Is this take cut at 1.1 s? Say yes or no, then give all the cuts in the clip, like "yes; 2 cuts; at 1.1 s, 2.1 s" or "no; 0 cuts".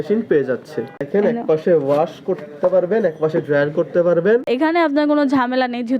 yes; 2 cuts; at 1.1 s, 4.5 s